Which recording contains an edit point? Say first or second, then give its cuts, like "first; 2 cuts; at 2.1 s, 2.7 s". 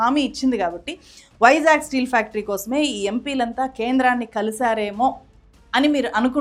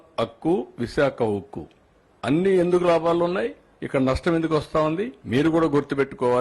second; 2 cuts; at 1.9 s, 5.1 s